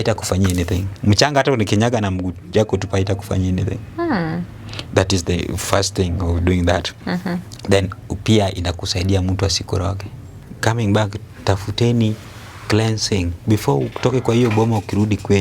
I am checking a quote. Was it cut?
yes; 1 cut; at 10.4 s

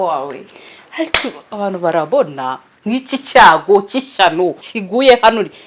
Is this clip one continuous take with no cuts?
no; 1 cut; at 4.6 s

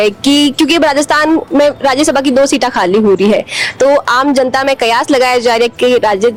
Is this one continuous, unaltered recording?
yes; 0 cuts

